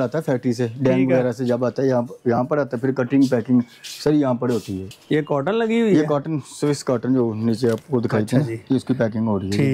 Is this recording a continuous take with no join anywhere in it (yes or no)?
no